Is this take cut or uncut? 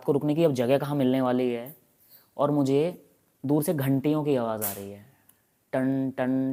uncut